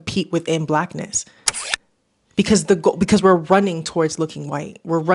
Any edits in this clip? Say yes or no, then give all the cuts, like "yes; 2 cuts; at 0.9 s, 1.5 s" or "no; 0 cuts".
no; 0 cuts